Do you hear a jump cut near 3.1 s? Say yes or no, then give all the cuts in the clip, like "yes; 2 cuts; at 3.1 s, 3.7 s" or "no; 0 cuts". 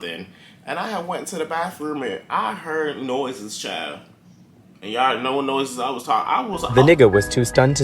no; 1 cut; at 6.6 s